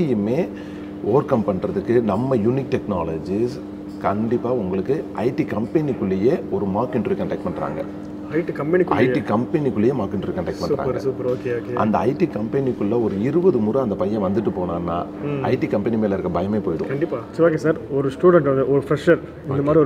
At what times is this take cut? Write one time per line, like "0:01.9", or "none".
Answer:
0:17.3